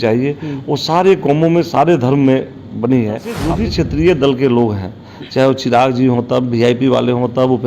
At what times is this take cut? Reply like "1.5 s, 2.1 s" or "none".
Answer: 3.4 s